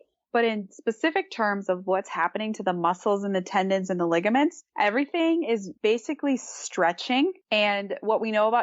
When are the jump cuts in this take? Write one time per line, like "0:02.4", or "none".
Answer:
0:04.6
0:05.7
0:07.4